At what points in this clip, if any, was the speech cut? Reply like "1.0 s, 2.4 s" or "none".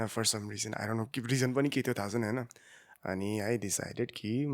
none